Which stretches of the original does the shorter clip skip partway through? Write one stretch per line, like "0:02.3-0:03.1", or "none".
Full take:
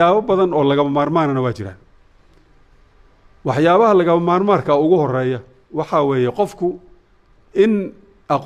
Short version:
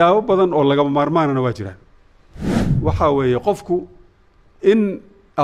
0:02.6-0:05.6